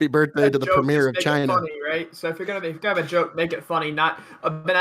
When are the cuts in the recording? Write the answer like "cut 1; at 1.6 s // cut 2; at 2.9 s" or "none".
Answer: none